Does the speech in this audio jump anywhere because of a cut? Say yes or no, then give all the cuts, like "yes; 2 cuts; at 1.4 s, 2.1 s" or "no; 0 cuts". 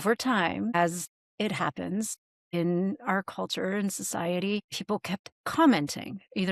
no; 0 cuts